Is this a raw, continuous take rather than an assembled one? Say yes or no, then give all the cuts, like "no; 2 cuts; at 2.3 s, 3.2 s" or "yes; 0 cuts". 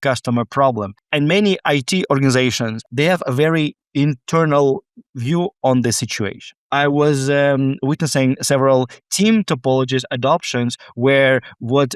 no; 3 cuts; at 1.0 s, 2.8 s, 6.6 s